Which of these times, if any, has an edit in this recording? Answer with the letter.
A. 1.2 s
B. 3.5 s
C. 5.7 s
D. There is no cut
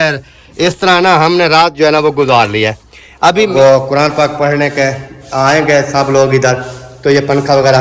B